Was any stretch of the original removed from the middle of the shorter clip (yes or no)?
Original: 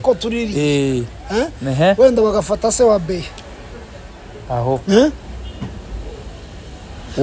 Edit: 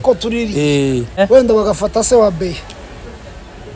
yes